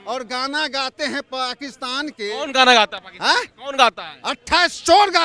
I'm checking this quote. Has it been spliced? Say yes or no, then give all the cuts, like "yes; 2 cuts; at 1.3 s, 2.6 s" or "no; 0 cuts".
no; 0 cuts